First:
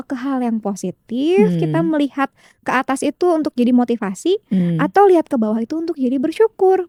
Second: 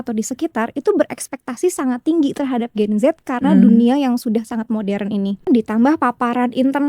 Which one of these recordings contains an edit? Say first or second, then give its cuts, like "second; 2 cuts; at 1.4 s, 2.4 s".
second; 1 cut; at 5.5 s